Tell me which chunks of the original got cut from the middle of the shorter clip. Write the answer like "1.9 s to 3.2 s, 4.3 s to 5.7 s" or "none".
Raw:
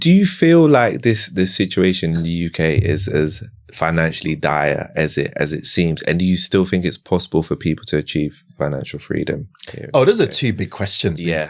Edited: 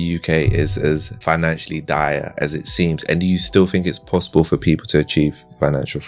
3.4 s to 3.7 s, 4.9 s to 5.3 s